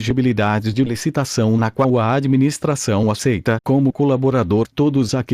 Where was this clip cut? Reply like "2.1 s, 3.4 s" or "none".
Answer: 1.0 s

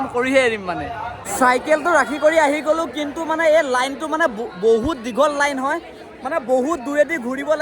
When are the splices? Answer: 1.2 s

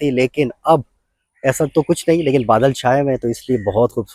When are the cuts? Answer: none

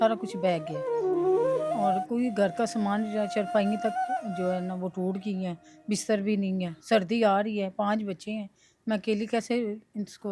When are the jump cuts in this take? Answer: none

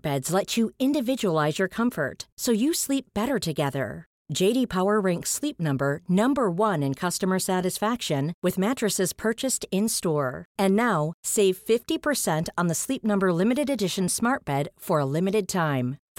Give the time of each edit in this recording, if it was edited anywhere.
none

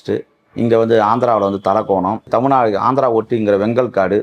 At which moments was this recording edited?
2.3 s

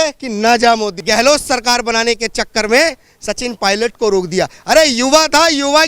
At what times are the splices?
1.0 s

